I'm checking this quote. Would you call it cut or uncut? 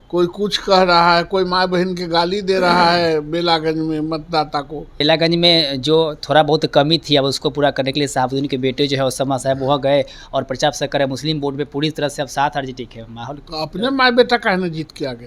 cut